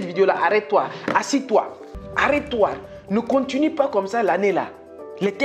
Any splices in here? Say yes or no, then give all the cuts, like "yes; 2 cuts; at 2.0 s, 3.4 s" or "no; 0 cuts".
yes; 1 cut; at 1.9 s